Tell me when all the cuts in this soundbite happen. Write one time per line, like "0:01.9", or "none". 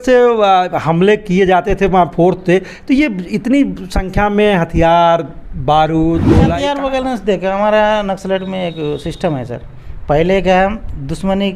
0:06.5